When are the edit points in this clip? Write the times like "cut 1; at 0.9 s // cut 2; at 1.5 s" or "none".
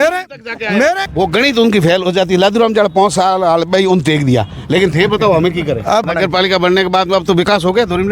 cut 1; at 1.0 s // cut 2; at 6.1 s